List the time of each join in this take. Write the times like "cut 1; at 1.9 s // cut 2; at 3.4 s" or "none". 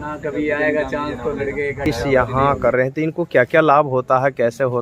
cut 1; at 1.8 s